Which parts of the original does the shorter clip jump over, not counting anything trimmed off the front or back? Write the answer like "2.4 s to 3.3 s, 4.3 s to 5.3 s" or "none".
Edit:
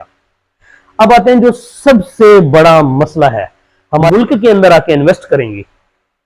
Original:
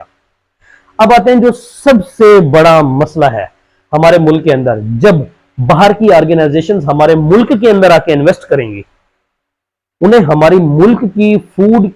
4.1 s to 7.3 s